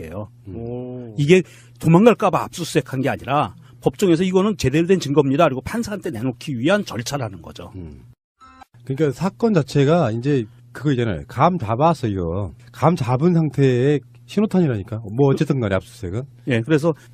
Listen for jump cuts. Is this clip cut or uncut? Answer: cut